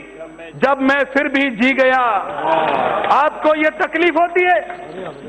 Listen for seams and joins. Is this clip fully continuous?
yes; 0 cuts

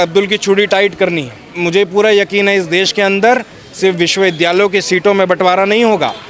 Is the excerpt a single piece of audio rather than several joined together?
no; 1 cut; at 1.6 s

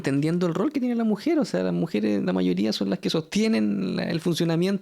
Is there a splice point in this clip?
no; 0 cuts

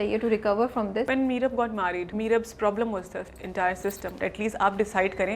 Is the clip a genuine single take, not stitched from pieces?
no; 4 cuts; at 1.1 s, 2.1 s, 3.4 s, 4.2 s

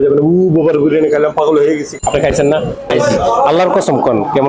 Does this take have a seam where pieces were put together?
yes; 2 cuts; at 2.0 s, 2.9 s

